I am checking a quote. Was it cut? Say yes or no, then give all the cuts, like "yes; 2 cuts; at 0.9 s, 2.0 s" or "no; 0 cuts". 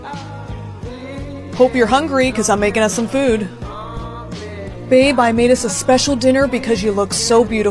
yes; 1 cut; at 0.9 s